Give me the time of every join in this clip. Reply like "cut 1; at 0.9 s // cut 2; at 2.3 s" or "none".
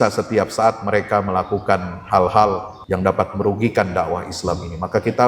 cut 1; at 2.7 s